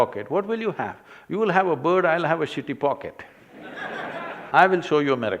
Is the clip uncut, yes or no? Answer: no